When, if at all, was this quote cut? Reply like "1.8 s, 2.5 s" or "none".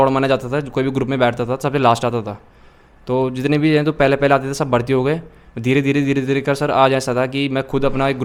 none